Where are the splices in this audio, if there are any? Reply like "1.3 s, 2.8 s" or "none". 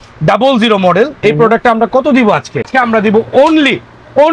2.7 s